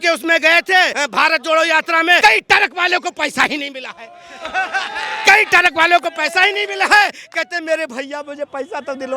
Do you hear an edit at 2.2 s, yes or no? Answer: yes